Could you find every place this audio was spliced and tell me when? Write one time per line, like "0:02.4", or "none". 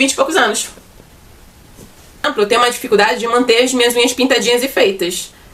0:02.3